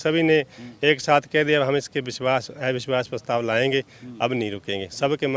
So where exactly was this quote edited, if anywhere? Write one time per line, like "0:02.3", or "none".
none

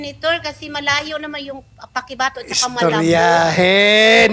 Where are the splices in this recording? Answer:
none

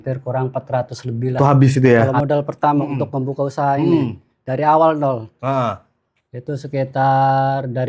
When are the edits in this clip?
0:02.1

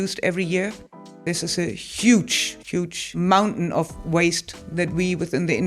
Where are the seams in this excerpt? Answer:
0:01.2
0:03.1

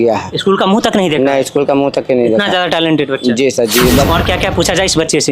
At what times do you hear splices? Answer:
0:04.1

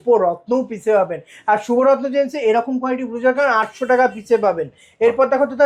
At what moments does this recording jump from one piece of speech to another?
none

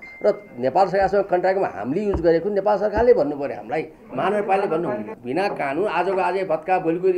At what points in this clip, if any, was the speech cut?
0:05.2

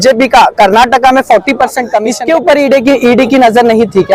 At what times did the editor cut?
0:02.1

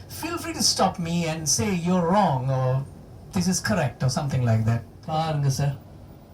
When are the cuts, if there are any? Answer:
0:04.9

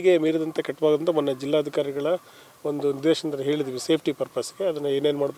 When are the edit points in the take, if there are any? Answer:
none

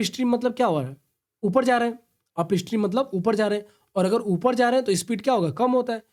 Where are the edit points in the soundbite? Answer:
none

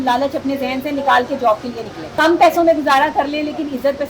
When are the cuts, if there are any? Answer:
0:02.2

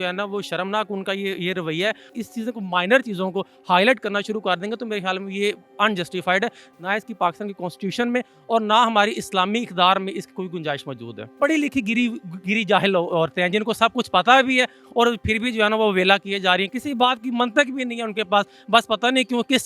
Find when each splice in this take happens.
0:02.1
0:06.7
0:11.3
0:16.7

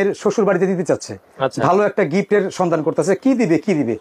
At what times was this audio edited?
none

